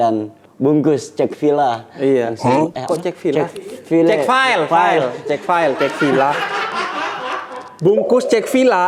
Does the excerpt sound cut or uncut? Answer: uncut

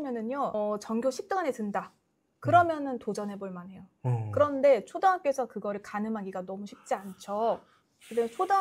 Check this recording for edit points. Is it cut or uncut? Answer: uncut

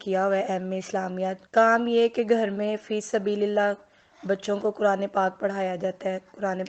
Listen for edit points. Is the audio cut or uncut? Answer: uncut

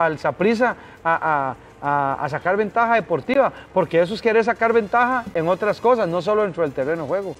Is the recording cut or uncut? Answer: uncut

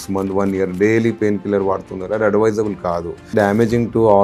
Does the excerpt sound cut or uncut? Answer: cut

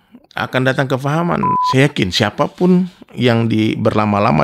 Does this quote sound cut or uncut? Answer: cut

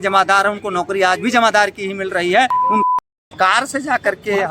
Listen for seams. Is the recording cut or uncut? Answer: cut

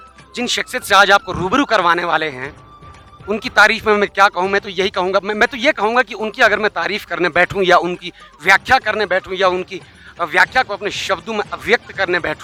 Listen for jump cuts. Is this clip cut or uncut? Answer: uncut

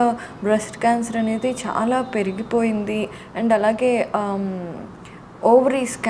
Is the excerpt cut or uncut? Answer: uncut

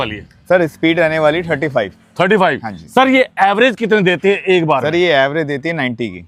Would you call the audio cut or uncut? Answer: uncut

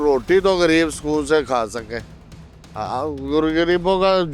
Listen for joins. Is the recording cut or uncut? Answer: uncut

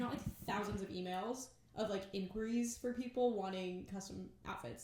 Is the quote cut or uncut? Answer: uncut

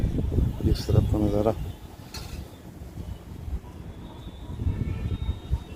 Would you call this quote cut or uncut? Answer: uncut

